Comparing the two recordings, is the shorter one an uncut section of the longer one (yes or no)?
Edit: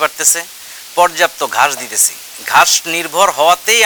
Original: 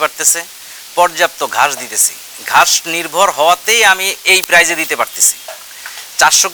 yes